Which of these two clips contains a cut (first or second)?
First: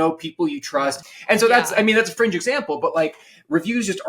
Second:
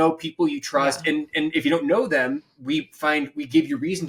first